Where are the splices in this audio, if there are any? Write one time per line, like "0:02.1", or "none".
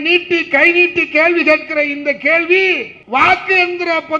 0:02.9